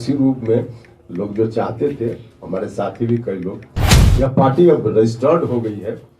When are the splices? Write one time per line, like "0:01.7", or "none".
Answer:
0:04.0